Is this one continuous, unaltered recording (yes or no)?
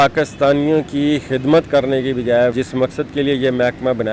no